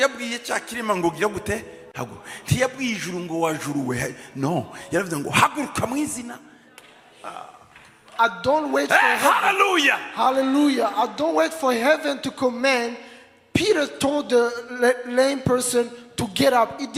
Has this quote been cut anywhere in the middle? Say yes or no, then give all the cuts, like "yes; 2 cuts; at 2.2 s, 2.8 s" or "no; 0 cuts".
no; 0 cuts